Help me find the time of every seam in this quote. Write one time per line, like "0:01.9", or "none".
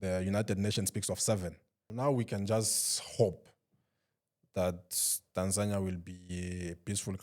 0:01.9